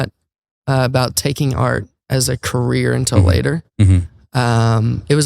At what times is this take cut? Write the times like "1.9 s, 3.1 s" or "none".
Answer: none

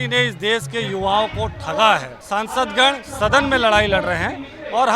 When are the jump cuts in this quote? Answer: 2.1 s

